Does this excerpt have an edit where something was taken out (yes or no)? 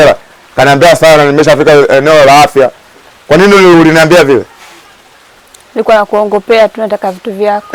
no